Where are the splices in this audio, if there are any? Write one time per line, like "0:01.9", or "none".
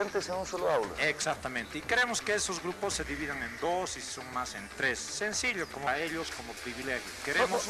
none